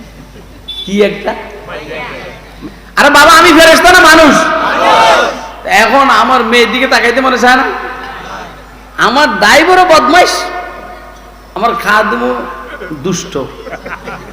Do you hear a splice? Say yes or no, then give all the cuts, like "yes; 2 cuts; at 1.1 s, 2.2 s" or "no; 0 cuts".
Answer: yes; 1 cut; at 2.5 s